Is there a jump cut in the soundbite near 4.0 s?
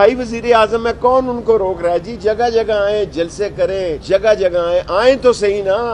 yes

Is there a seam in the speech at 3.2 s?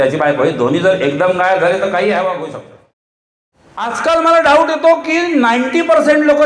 yes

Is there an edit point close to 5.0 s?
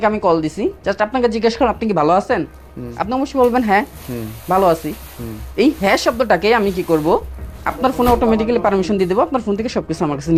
no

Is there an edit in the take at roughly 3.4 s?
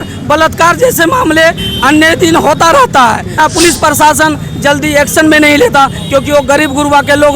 yes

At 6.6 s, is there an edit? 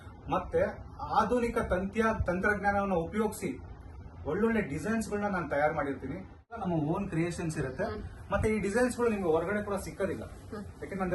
yes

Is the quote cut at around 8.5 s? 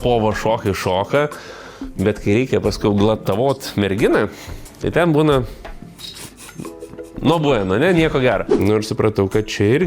yes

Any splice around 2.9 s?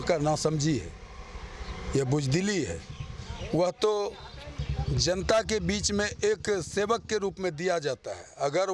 no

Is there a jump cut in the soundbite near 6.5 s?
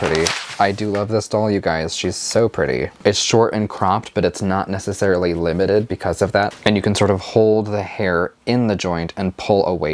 yes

